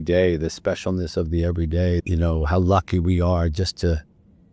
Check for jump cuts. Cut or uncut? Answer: cut